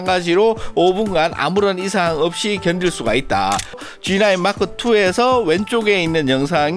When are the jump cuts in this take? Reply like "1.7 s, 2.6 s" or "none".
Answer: 3.8 s